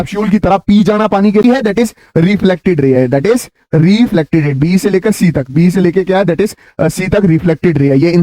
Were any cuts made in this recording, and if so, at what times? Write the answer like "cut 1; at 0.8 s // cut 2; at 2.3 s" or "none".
cut 1; at 1.4 s